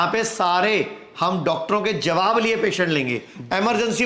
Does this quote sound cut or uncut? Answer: uncut